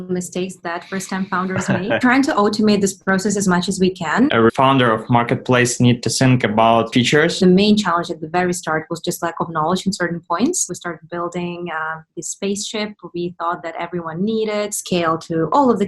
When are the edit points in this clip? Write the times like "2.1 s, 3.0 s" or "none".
2.0 s, 4.3 s, 7.4 s, 10.6 s, 14.8 s